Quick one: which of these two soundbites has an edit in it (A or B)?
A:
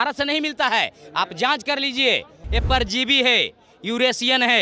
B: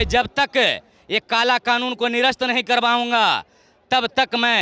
A